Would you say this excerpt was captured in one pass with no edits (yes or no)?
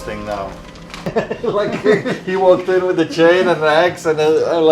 no